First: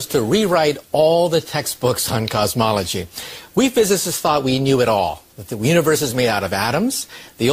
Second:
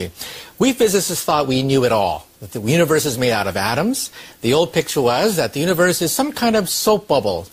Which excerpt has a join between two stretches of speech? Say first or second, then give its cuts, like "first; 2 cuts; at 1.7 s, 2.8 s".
second; 1 cut; at 6.2 s